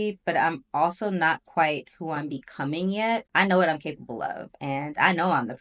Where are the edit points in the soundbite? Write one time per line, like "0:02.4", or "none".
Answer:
0:03.3